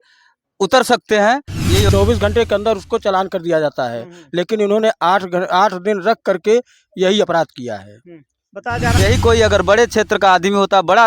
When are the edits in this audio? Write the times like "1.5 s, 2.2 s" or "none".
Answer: 1.9 s, 8.9 s